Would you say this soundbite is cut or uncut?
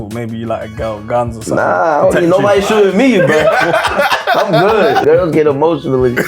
cut